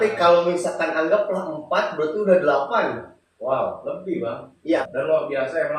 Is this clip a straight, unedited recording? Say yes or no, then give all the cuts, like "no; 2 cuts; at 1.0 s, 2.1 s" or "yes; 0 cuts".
no; 1 cut; at 4.6 s